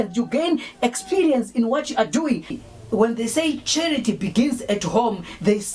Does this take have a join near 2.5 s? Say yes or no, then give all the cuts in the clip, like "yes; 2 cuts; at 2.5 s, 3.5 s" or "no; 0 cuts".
yes; 1 cut; at 2.5 s